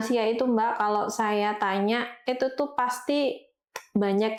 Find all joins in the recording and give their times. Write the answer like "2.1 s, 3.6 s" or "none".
none